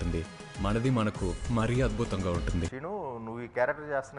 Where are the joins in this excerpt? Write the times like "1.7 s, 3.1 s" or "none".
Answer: 2.7 s